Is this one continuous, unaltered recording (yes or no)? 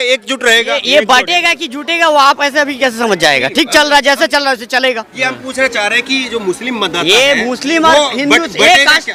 yes